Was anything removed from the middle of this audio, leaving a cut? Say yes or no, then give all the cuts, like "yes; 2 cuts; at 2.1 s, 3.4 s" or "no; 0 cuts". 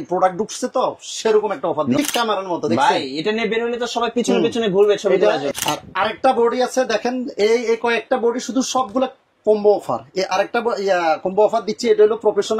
yes; 2 cuts; at 2.0 s, 5.4 s